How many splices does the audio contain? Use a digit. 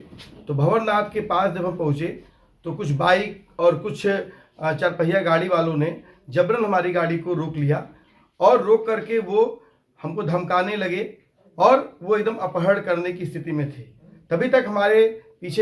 0